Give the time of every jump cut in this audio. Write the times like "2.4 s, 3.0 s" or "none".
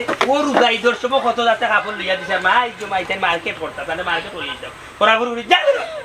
none